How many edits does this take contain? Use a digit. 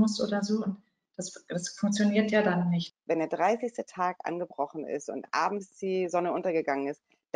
1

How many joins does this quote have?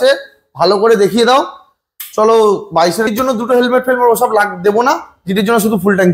1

